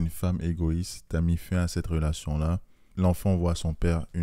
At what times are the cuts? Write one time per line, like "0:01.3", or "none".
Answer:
0:02.8